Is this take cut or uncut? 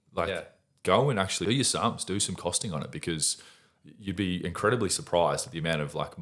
cut